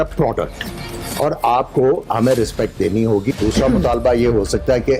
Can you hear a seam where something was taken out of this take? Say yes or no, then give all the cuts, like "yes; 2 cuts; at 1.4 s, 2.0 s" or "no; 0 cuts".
yes; 1 cut; at 3.3 s